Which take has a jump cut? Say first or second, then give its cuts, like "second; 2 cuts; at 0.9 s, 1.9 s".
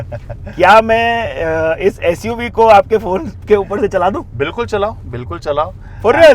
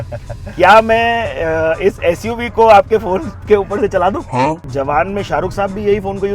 second; 1 cut; at 4.3 s